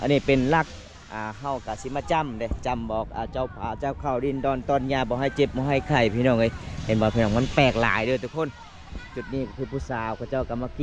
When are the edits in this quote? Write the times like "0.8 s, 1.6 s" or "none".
none